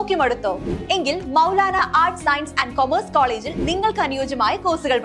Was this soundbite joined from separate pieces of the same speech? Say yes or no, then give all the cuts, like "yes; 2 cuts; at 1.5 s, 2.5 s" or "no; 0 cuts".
no; 0 cuts